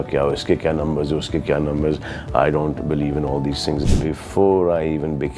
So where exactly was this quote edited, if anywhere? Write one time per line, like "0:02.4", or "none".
0:03.8

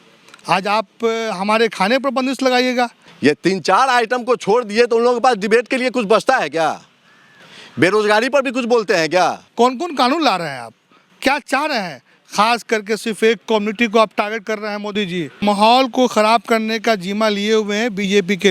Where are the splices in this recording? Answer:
0:03.0
0:09.4
0:15.4

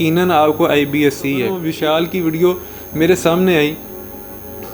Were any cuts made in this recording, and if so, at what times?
0:01.6

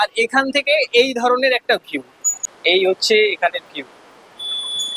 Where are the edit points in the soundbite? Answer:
none

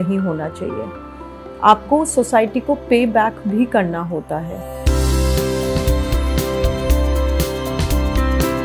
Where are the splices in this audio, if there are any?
0:05.0

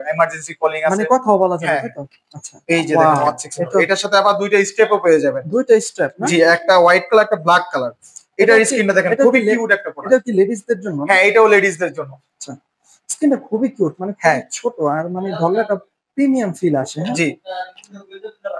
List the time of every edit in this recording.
0:02.5

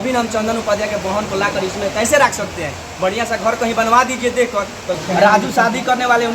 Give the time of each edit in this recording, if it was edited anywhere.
0:04.9

